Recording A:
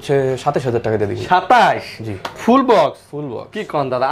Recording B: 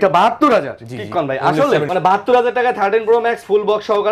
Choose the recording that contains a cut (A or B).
B